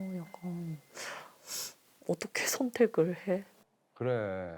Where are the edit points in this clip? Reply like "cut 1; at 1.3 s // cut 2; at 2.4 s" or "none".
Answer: none